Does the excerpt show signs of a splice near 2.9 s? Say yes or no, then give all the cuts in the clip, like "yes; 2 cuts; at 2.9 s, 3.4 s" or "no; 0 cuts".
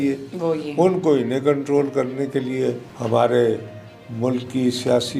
yes; 1 cut; at 2.9 s